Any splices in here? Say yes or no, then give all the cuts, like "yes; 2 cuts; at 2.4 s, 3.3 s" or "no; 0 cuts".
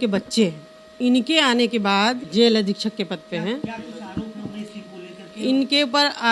yes; 2 cuts; at 0.9 s, 2.2 s